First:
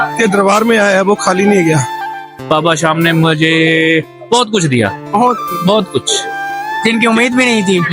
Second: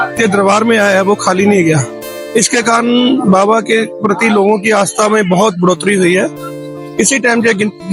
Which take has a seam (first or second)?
first